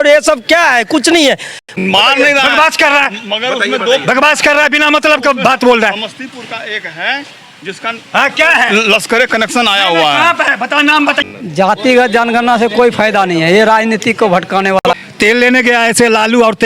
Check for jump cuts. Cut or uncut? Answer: cut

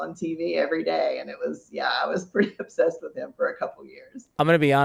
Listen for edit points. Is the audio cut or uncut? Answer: uncut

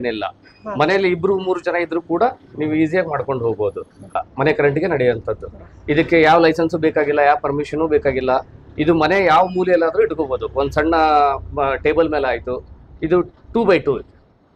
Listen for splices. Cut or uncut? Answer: cut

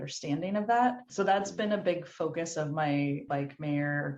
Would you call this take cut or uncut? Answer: uncut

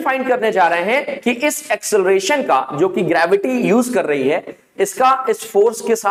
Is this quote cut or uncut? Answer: uncut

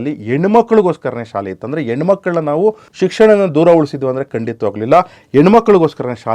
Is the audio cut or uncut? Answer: cut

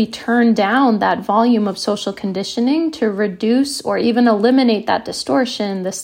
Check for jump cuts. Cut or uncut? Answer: uncut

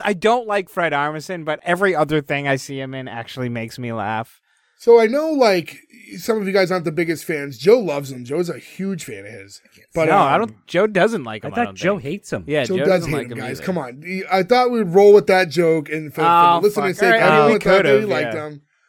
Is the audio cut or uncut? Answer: cut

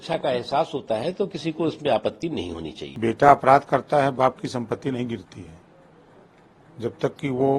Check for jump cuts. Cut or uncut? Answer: cut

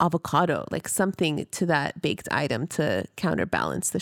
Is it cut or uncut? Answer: uncut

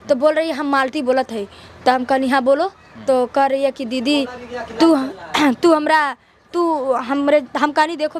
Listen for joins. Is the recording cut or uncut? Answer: uncut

